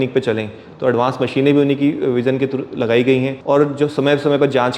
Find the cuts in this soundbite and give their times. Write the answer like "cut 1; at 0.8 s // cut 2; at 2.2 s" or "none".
cut 1; at 3.4 s